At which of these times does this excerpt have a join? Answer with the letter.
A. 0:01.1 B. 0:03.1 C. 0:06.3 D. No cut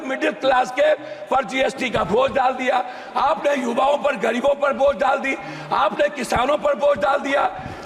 D